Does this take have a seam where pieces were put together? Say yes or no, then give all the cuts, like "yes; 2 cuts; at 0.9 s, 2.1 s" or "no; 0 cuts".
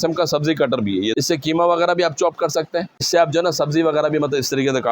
yes; 2 cuts; at 1.1 s, 3.1 s